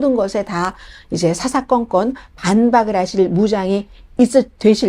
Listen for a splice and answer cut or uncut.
uncut